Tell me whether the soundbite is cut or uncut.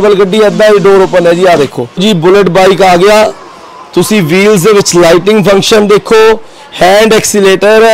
cut